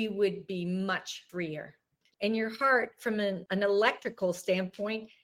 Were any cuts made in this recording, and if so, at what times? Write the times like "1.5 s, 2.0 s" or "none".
1.6 s, 3.4 s